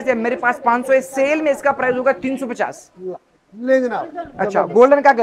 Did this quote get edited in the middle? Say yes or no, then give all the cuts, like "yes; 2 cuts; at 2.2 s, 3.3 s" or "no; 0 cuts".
no; 0 cuts